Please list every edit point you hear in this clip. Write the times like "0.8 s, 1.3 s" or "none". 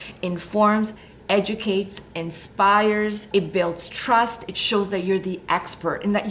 3.2 s